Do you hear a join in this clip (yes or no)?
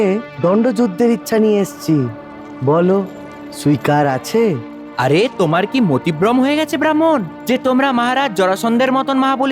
no